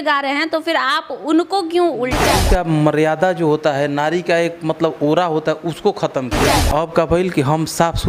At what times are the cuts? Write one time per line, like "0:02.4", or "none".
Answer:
0:02.3
0:06.6